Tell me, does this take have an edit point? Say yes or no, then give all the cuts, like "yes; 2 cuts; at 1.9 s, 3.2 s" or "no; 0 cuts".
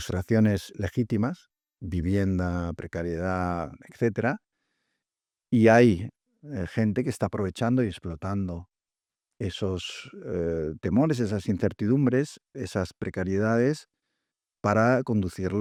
no; 0 cuts